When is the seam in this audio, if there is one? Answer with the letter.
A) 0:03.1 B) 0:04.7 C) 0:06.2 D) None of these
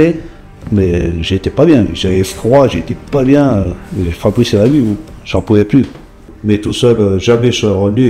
C